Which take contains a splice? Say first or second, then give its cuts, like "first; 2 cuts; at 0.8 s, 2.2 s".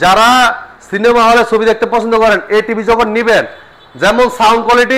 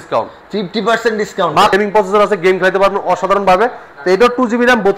second; 1 cut; at 1.7 s